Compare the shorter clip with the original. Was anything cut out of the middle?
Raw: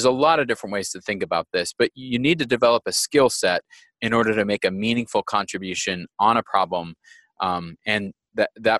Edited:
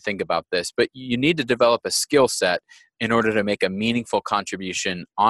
no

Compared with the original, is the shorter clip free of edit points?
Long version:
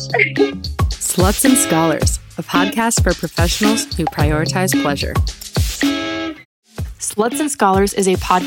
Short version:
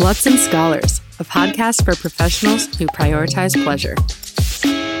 yes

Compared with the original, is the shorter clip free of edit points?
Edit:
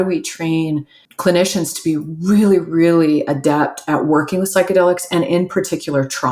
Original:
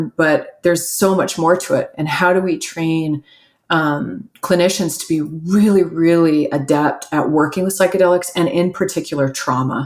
no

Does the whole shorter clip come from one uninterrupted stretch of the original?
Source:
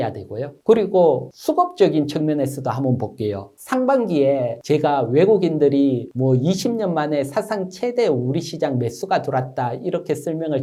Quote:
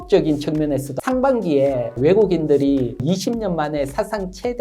no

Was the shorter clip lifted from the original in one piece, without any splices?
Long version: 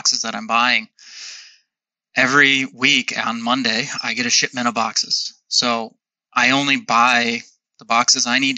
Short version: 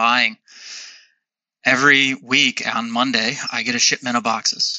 yes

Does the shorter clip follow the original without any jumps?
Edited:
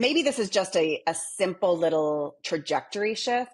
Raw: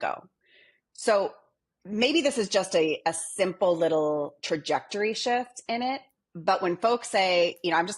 yes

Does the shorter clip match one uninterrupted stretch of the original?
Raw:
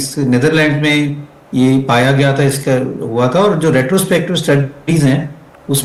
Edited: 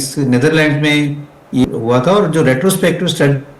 no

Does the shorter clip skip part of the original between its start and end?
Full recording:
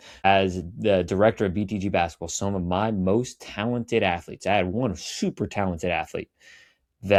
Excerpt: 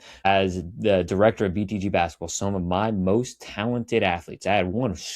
no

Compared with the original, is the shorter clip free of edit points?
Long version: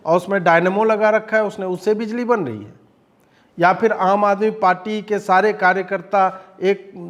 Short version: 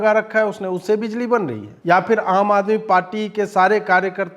no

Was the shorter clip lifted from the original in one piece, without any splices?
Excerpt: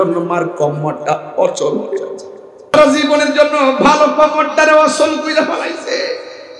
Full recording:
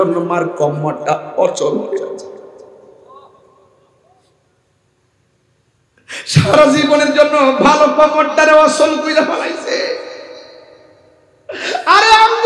no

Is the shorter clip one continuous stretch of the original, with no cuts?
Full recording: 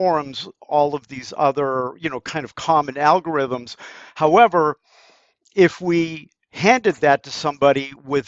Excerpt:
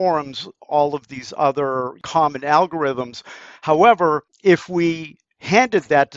no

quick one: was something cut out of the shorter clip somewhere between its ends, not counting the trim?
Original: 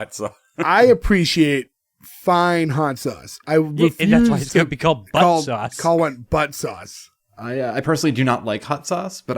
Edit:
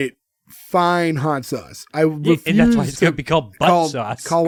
no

